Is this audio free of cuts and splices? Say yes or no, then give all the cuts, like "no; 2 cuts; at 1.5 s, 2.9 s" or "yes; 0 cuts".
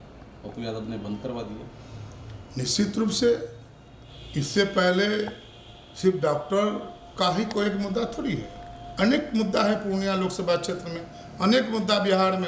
yes; 0 cuts